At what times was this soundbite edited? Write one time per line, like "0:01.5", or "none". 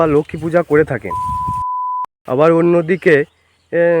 0:01.6